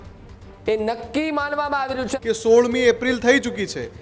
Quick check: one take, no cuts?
no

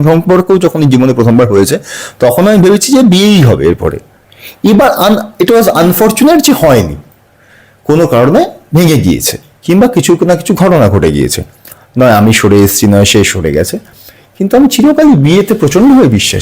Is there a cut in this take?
no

